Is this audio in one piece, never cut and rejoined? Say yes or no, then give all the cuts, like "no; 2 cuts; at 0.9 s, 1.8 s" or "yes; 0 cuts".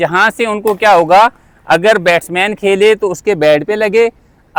yes; 0 cuts